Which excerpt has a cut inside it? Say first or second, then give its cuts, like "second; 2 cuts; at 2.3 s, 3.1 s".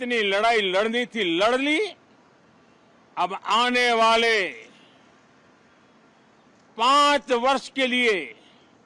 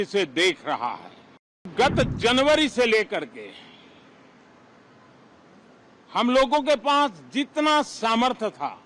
second; 1 cut; at 1.7 s